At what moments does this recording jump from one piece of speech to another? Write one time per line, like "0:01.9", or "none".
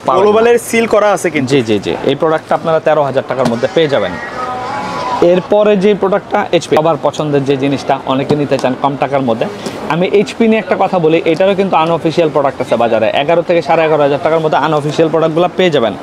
none